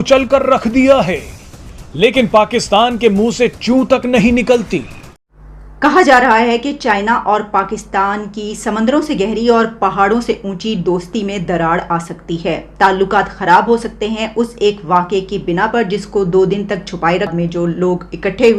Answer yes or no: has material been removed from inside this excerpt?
yes